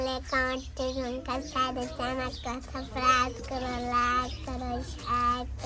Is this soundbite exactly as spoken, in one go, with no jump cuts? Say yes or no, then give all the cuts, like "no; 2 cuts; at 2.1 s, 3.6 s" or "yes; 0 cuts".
yes; 0 cuts